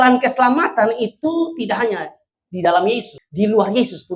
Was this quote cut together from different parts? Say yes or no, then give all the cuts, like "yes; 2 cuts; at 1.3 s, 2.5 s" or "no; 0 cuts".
yes; 1 cut; at 3.2 s